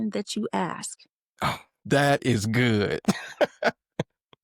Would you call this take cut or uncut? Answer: cut